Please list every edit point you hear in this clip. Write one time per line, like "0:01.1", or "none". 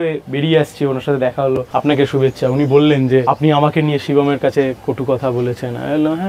0:01.7
0:03.2